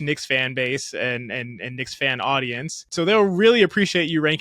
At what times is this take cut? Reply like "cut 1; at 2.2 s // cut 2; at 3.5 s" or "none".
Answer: cut 1; at 2.8 s